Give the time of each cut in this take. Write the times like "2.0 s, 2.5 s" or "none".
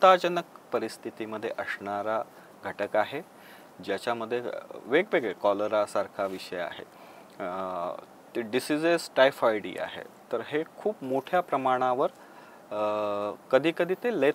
none